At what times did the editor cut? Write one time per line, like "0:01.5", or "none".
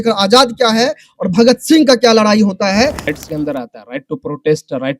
0:03.1